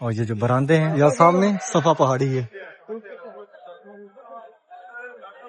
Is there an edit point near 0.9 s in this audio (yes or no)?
yes